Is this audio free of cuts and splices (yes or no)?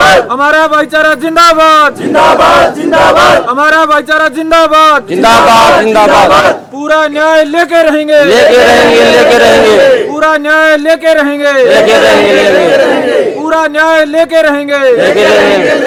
yes